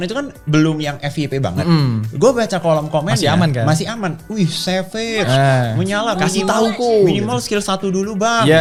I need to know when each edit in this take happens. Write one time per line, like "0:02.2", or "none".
none